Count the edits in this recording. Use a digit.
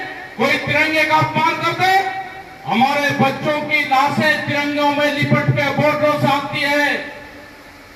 0